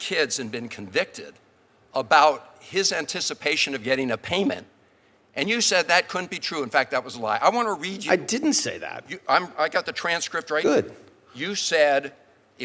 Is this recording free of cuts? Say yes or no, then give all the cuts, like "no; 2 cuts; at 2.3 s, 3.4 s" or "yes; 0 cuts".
yes; 0 cuts